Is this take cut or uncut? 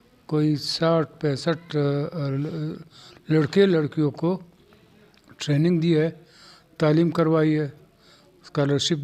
uncut